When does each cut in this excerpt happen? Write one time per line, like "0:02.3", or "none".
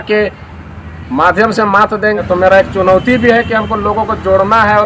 0:02.2